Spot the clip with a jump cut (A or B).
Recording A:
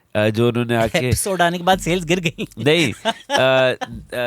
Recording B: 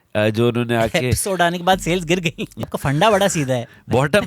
B